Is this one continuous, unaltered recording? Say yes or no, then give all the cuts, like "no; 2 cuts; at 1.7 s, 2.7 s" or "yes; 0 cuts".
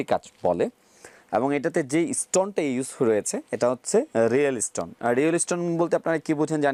yes; 0 cuts